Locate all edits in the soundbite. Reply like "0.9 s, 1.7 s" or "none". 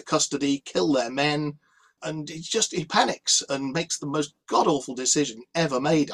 none